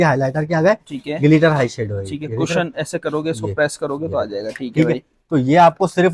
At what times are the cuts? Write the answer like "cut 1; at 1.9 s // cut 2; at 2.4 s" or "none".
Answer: none